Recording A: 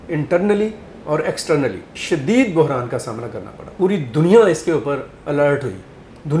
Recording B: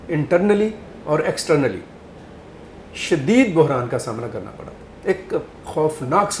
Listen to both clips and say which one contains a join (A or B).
A